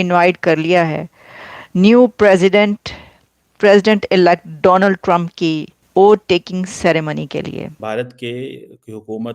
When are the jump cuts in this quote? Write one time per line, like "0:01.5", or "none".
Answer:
0:05.7
0:07.8